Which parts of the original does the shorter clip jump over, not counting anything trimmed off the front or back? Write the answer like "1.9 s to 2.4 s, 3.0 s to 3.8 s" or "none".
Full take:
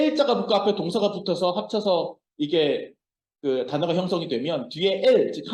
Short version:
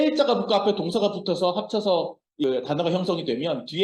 2.4 s to 3.5 s